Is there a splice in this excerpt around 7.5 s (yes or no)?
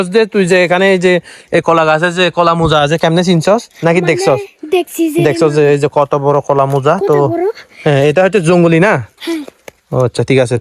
no